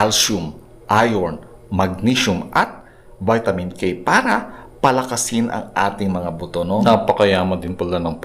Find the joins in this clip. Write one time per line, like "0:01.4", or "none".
0:06.8